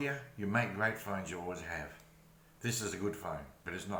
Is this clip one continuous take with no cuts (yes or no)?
yes